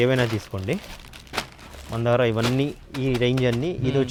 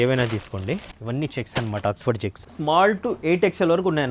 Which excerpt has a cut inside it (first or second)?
second